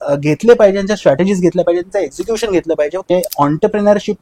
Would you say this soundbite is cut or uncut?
cut